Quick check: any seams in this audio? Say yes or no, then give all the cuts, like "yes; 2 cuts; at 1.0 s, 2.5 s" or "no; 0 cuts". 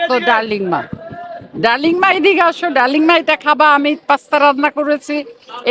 no; 0 cuts